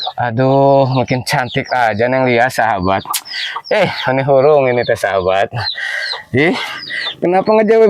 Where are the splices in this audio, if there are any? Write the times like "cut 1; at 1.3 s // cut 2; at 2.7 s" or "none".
none

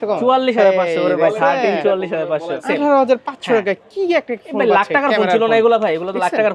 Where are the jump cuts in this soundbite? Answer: cut 1; at 2.5 s

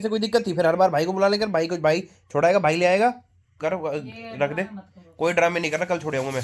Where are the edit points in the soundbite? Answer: cut 1; at 3.6 s

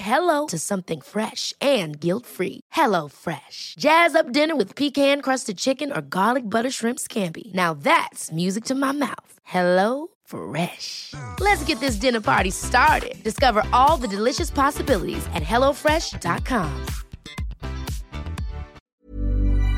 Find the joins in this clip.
cut 1; at 18.8 s

